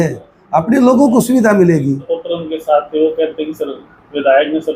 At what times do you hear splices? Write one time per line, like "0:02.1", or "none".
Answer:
0:02.1